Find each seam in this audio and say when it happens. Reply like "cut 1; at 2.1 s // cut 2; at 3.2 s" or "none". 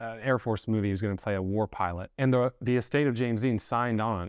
cut 1; at 2.0 s